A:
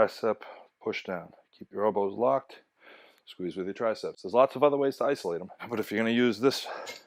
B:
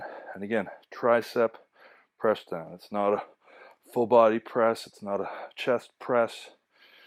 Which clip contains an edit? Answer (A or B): A